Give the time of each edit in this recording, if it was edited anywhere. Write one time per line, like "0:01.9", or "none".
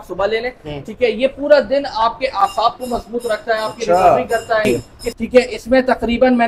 0:04.6

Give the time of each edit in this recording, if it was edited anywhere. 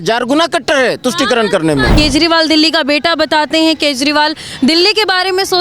0:01.9

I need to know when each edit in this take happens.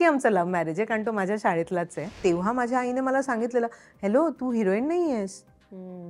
0:02.2

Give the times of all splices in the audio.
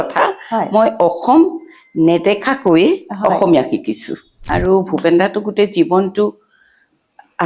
0:04.5

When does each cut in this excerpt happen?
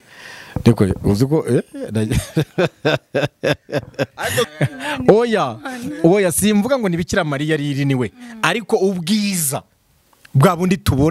0:04.5

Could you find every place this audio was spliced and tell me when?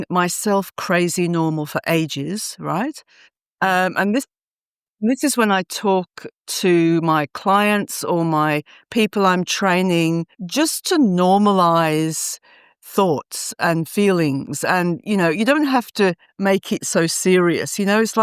none

